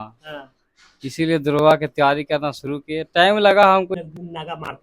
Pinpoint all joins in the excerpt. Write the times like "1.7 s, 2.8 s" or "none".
3.9 s